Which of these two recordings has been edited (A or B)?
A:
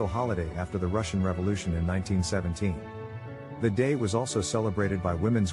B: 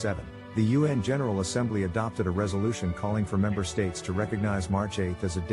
B